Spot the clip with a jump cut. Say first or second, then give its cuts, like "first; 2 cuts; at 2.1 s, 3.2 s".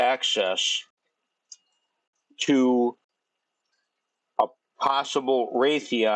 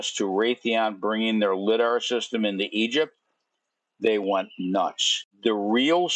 second; 1 cut; at 5.2 s